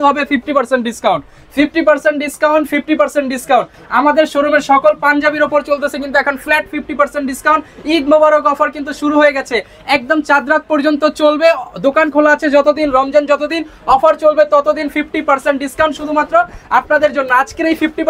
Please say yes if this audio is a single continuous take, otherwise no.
yes